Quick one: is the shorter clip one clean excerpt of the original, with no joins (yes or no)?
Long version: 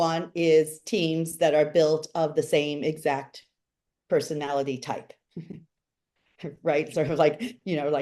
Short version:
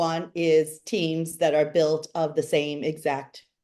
yes